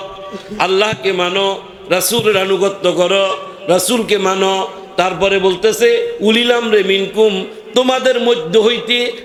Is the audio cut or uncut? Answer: uncut